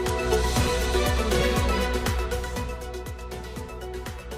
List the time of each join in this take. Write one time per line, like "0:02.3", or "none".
none